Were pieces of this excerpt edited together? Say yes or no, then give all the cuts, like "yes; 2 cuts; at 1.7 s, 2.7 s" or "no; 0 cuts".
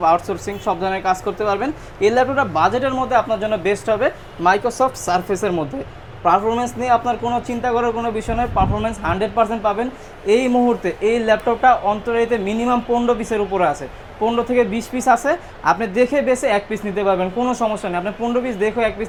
no; 0 cuts